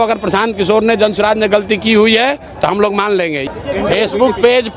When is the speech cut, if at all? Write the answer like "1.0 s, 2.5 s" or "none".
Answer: 3.4 s